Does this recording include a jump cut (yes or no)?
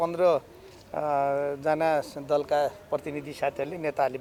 no